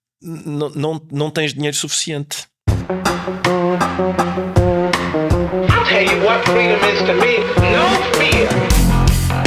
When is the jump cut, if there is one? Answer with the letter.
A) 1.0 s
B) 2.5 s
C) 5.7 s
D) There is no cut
B